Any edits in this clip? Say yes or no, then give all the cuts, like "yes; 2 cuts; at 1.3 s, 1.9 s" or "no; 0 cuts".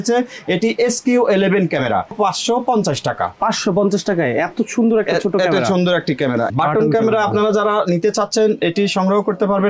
yes; 2 cuts; at 2.1 s, 6.5 s